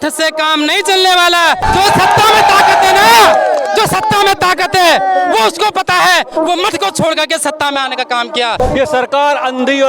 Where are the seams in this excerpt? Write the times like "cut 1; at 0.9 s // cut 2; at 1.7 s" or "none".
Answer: cut 1; at 1.6 s // cut 2; at 8.6 s